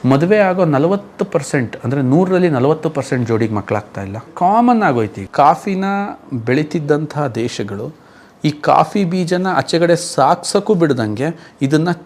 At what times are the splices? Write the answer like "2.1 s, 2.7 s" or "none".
4.3 s, 5.2 s